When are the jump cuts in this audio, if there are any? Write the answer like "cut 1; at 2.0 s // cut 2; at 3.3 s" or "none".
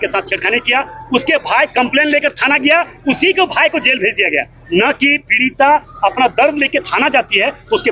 none